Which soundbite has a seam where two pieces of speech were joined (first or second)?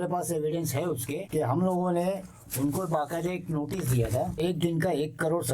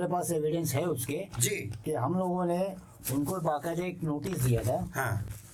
first